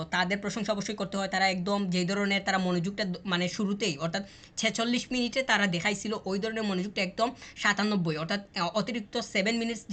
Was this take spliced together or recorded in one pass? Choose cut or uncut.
uncut